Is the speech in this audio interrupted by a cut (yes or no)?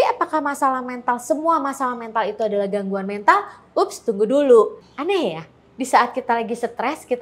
yes